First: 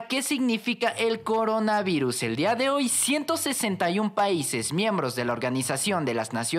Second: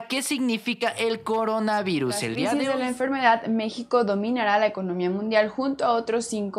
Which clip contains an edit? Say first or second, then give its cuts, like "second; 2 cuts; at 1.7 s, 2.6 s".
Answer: second; 1 cut; at 2.5 s